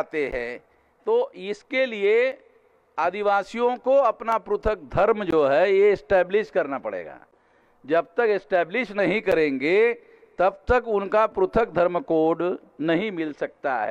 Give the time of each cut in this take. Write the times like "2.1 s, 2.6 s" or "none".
none